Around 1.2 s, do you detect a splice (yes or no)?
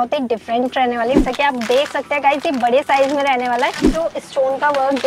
yes